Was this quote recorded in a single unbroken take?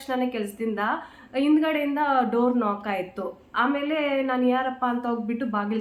yes; 0 cuts

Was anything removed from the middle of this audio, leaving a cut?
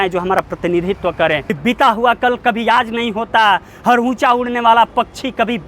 yes; 1 cut; at 1.3 s

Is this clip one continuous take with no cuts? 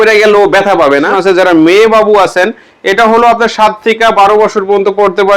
no; 1 cut; at 1.1 s

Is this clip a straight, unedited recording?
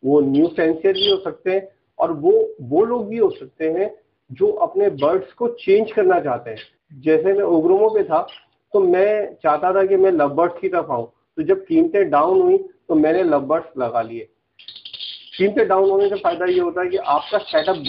yes; 0 cuts

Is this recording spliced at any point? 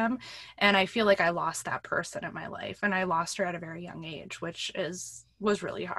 no; 0 cuts

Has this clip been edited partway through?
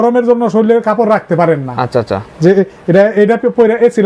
no; 0 cuts

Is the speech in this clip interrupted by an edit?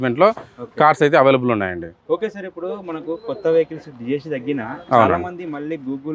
no; 0 cuts

